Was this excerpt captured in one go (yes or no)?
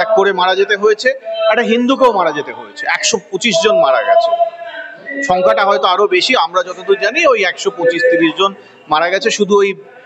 yes